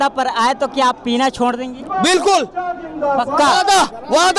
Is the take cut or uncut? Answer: uncut